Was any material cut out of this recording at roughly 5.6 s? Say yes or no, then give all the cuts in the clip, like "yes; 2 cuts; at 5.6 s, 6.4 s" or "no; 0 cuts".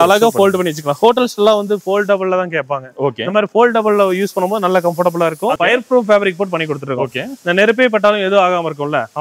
yes; 1 cut; at 5.6 s